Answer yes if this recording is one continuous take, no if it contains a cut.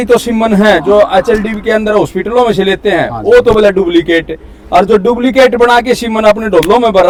yes